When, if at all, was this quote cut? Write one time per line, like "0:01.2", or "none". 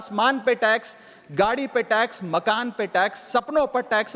none